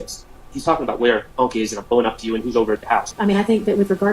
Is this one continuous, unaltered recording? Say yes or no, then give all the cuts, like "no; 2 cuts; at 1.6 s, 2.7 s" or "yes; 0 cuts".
no; 1 cut; at 3.1 s